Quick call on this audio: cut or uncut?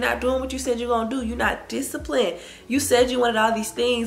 uncut